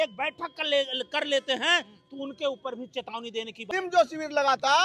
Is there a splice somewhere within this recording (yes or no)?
yes